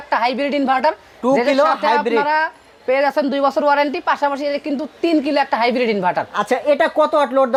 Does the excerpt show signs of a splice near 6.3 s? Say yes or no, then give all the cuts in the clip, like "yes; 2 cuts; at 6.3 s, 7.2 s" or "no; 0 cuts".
no; 0 cuts